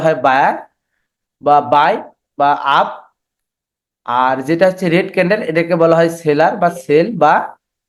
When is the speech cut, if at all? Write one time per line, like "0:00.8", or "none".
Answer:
none